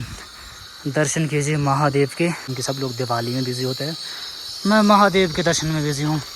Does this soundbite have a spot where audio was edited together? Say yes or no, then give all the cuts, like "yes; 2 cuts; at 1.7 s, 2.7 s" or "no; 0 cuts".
yes; 1 cut; at 2.5 s